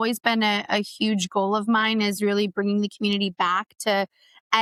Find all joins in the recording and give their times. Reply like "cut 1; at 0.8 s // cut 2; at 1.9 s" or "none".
none